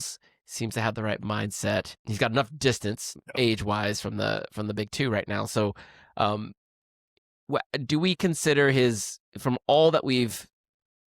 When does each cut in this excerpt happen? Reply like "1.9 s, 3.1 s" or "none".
2.0 s, 3.2 s